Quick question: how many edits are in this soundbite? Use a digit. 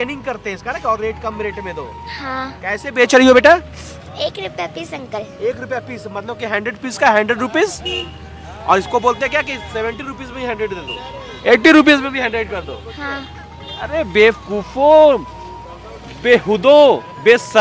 0